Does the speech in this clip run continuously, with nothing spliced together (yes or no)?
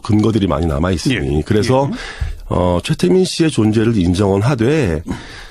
yes